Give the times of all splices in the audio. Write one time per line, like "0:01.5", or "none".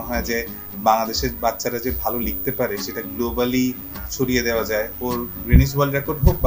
none

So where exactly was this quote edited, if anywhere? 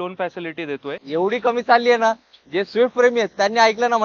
0:01.0

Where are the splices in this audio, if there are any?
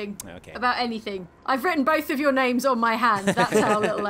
0:01.5

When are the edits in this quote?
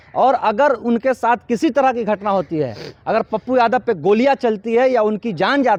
none

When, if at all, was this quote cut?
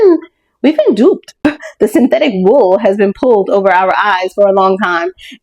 0:01.4

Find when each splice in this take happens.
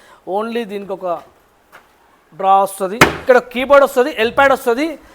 0:03.2

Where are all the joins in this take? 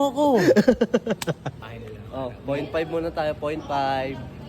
0:01.7

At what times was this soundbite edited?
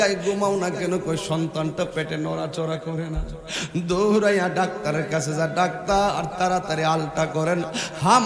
none

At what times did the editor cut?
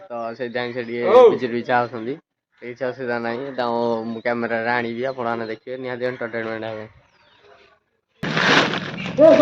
0:08.2

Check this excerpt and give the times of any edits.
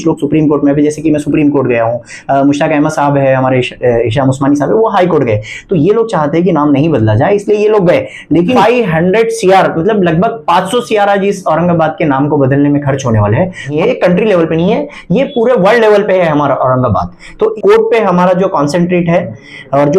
0:08.6
0:13.7
0:17.5

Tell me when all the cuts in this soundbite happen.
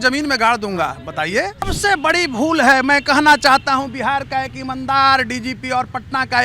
0:01.7

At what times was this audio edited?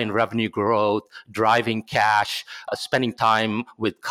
0:02.7

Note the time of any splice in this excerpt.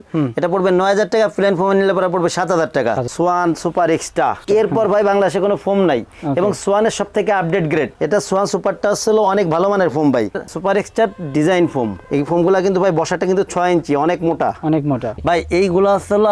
0:03.1
0:10.4
0:15.1

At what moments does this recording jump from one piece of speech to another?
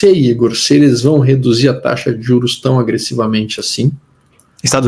none

